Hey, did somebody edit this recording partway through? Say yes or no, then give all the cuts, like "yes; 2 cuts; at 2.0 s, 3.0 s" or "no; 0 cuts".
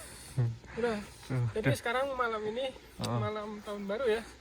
no; 0 cuts